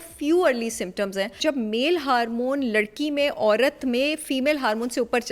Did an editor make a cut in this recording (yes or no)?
yes